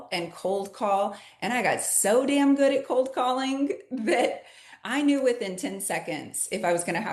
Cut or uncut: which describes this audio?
uncut